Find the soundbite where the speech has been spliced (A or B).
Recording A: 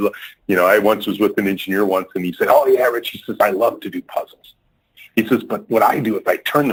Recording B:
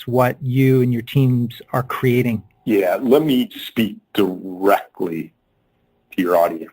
B